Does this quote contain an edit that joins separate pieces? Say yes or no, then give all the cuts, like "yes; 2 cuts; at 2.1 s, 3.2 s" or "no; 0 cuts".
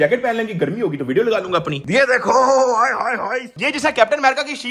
yes; 2 cuts; at 1.8 s, 3.5 s